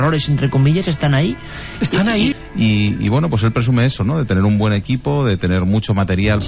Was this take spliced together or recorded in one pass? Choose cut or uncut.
cut